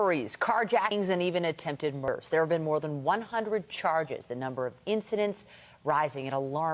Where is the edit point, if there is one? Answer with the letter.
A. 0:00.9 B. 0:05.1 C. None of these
A